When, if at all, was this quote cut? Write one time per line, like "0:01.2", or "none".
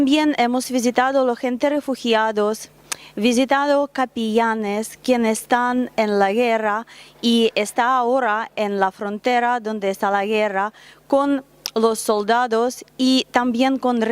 0:12.5